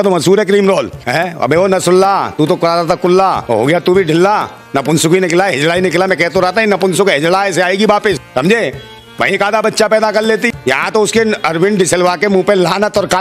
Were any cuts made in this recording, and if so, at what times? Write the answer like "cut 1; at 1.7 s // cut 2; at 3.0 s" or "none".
cut 1; at 1.0 s